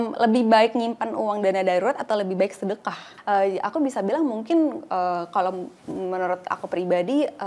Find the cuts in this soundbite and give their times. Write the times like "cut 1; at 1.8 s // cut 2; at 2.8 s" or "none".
cut 1; at 3.0 s